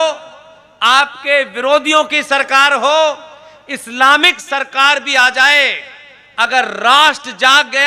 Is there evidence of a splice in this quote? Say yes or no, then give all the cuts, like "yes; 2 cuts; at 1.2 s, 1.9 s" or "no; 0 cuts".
no; 0 cuts